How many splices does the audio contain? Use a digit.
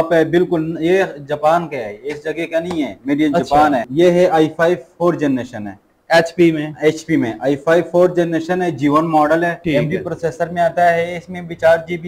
2